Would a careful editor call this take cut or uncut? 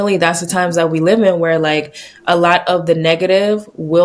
uncut